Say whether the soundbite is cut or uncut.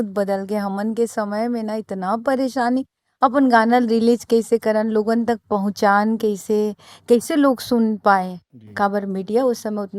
uncut